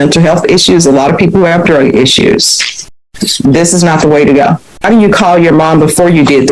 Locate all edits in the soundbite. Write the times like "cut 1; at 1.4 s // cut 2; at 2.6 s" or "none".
cut 1; at 4.9 s